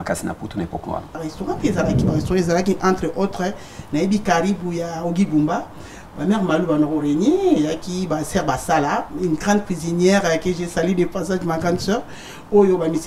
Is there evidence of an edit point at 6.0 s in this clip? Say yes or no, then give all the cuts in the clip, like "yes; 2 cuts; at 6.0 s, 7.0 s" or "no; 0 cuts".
no; 1 cut; at 1.2 s